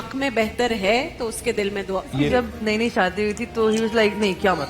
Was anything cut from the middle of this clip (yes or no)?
yes